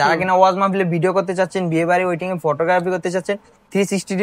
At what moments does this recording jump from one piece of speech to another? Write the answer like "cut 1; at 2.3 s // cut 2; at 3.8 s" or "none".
none